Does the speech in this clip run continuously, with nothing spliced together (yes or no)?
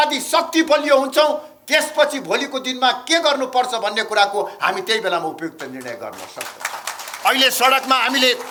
yes